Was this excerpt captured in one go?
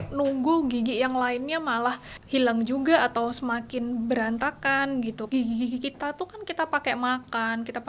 no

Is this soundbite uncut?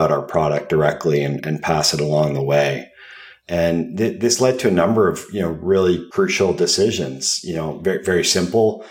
no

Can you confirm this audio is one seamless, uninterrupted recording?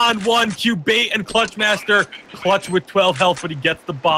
yes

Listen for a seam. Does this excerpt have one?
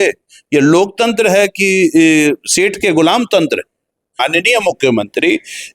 yes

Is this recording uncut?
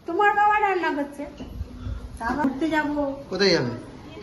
no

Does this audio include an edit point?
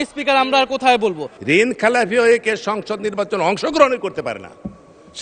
yes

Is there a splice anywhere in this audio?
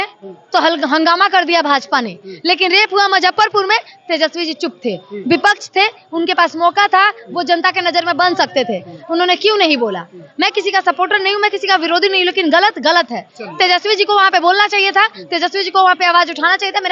no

